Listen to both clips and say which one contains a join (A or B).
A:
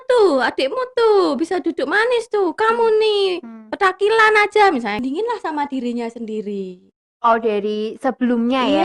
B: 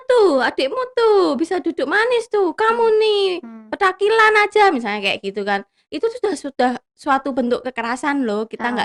A